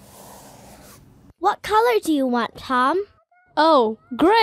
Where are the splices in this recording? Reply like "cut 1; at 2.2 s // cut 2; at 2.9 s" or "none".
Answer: cut 1; at 1.2 s